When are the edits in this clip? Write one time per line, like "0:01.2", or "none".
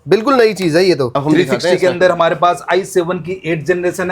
0:01.1